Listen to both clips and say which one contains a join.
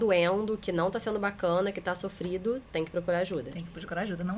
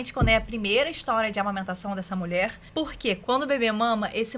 second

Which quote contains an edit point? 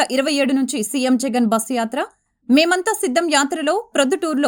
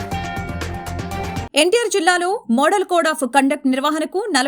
second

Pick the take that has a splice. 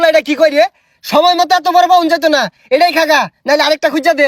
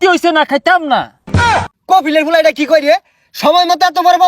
second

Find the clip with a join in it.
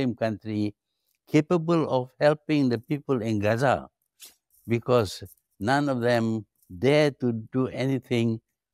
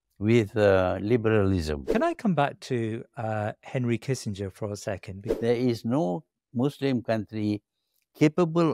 second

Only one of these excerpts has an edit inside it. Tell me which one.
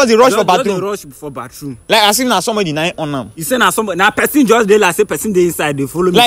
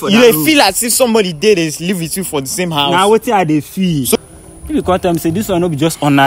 second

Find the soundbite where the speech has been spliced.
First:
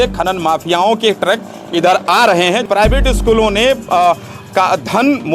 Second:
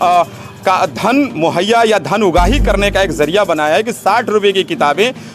first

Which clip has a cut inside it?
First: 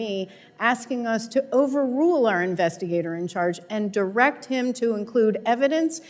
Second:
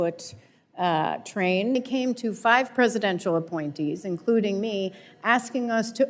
second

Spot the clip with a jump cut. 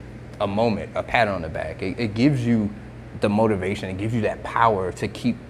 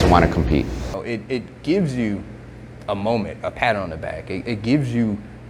second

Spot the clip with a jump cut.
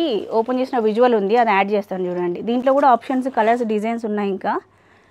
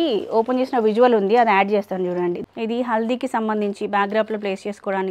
second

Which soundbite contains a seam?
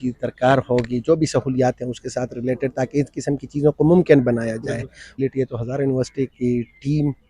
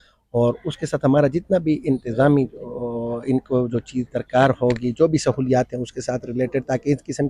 first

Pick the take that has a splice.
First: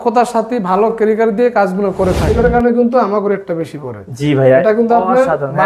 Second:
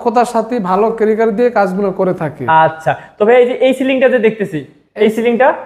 first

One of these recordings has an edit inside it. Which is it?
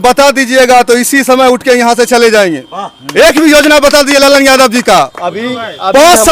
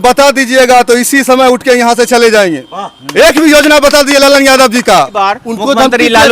second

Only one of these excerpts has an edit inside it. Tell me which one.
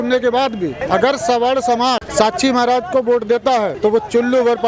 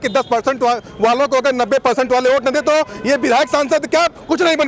first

